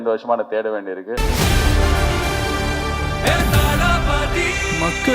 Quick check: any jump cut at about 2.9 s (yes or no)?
no